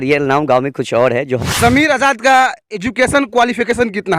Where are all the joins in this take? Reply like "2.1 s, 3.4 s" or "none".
1.5 s